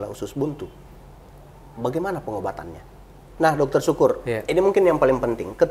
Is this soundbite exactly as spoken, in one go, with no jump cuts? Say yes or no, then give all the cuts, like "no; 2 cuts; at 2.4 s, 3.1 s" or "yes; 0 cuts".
no; 1 cut; at 3.2 s